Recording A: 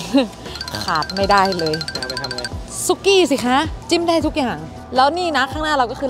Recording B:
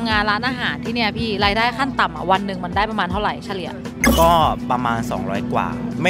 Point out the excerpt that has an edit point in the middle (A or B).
A